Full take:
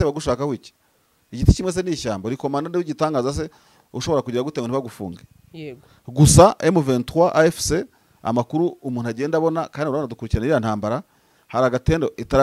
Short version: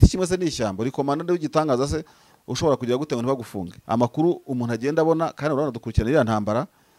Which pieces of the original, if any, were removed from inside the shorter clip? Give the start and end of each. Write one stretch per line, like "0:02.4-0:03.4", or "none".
0:05.1-0:08.0